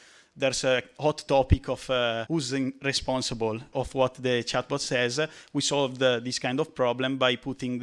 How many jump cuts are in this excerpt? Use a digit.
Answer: 2